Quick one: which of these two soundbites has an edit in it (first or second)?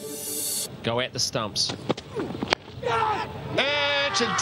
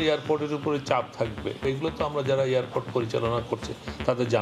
second